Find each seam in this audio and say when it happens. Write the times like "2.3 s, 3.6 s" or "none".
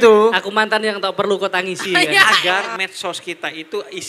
2.3 s